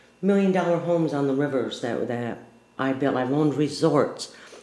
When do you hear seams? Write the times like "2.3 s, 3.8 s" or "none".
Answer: none

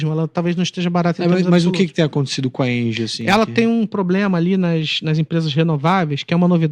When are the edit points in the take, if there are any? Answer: none

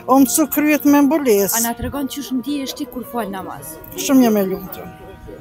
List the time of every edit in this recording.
none

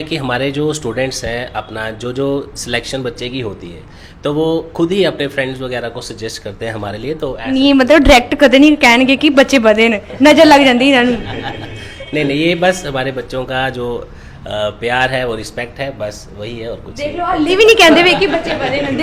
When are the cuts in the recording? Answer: none

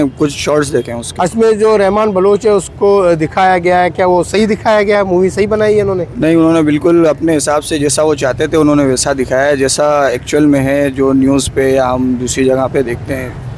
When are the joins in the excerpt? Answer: none

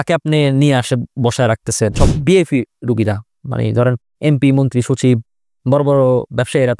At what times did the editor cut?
1.9 s

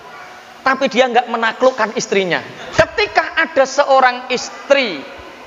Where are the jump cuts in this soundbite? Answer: 2.6 s

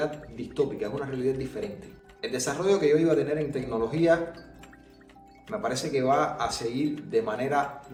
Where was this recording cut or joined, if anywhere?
none

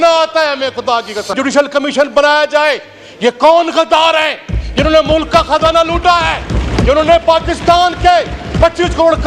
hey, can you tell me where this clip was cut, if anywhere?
1.3 s

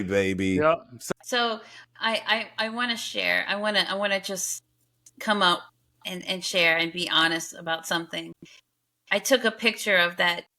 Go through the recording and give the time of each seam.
1.0 s

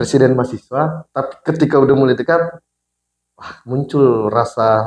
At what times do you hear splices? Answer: none

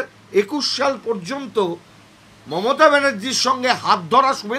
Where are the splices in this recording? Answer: none

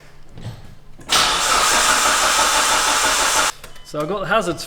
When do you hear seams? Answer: 3.5 s

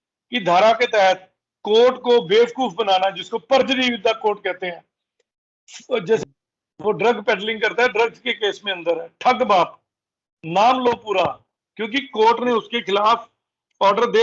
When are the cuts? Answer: 6.2 s

